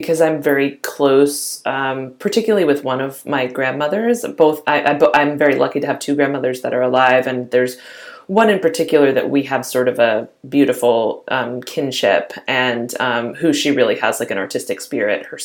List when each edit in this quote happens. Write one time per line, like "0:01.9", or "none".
none